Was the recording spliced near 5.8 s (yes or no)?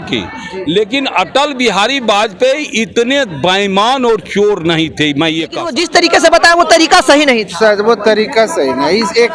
yes